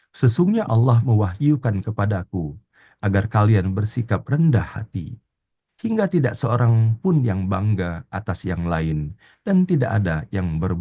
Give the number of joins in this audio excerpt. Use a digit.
0